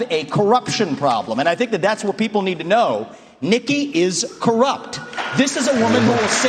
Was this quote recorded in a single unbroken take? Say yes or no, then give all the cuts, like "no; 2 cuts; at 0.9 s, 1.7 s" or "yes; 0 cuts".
yes; 0 cuts